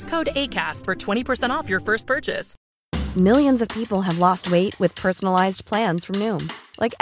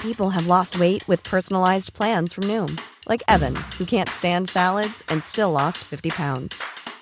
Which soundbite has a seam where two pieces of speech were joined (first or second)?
first